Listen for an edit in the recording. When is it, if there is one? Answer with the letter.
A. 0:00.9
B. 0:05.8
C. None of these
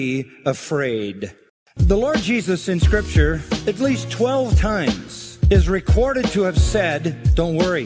B